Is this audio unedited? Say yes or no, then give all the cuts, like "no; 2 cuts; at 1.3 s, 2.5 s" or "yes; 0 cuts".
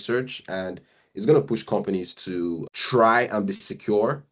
no; 1 cut; at 2.7 s